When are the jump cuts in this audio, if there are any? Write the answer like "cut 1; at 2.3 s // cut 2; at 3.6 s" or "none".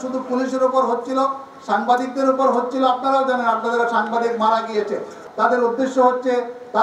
cut 1; at 5.2 s